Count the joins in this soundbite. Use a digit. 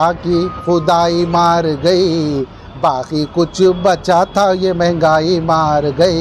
0